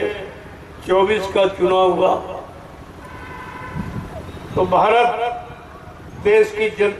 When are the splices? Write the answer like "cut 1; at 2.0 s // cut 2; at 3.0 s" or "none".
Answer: none